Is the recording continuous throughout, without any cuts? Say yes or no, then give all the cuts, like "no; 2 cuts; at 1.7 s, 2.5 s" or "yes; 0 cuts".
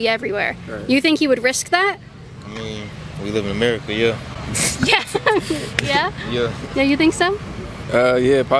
yes; 0 cuts